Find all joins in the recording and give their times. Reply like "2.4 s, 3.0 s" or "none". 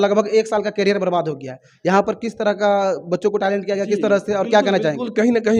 none